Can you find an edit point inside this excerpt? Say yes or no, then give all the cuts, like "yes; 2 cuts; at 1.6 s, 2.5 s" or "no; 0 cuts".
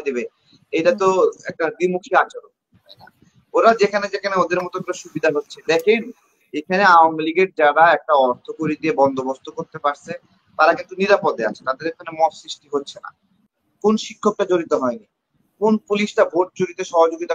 yes; 1 cut; at 13.3 s